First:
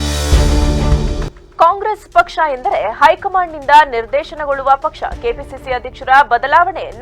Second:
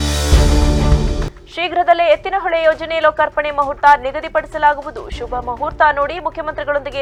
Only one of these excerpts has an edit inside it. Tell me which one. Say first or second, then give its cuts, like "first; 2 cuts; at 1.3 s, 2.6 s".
first; 1 cut; at 1.0 s